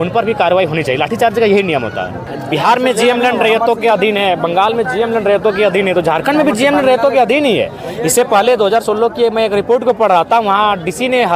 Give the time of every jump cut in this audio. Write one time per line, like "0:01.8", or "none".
0:02.2